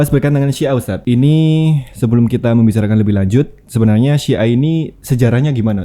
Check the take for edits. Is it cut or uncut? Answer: cut